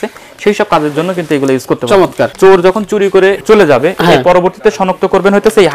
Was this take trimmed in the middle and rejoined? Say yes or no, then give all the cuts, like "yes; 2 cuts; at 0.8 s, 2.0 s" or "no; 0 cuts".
yes; 2 cuts; at 2.3 s, 3.4 s